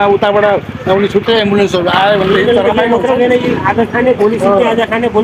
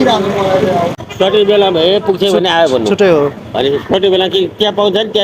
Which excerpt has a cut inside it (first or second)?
second